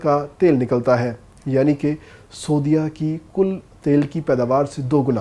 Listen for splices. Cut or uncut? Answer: uncut